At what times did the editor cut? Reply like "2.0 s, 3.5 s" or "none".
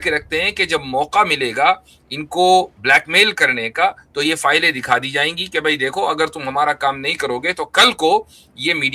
none